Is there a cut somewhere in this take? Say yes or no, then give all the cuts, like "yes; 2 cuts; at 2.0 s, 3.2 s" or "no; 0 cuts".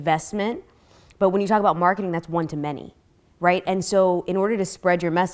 no; 0 cuts